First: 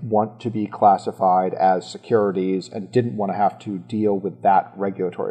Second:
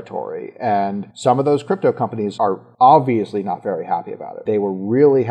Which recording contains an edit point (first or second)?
second